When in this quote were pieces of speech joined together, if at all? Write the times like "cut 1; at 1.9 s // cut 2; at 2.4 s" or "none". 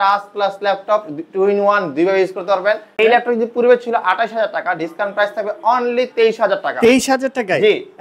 cut 1; at 2.9 s